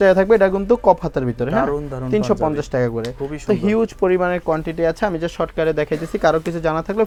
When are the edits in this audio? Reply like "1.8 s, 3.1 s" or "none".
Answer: none